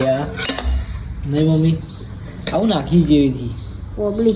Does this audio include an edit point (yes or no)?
no